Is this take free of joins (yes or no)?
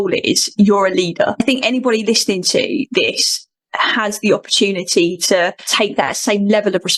no